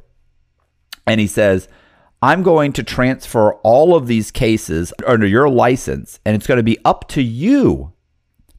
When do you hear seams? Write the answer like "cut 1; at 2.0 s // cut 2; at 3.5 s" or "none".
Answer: cut 1; at 5.0 s